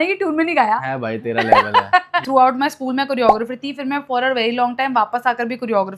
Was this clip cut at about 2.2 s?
yes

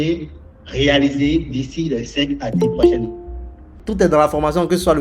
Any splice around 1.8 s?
no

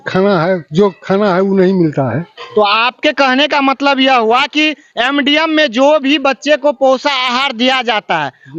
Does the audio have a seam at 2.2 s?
no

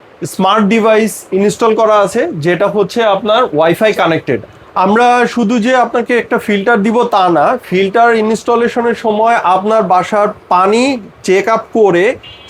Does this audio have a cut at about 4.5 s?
yes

